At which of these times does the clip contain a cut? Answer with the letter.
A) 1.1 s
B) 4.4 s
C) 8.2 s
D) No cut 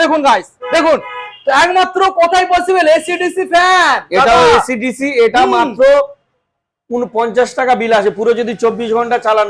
D